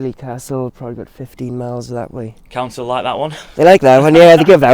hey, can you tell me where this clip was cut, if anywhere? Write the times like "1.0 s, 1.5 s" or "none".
none